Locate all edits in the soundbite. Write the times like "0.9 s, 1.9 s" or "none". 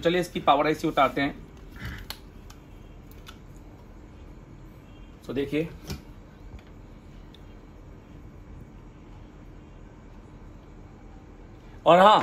none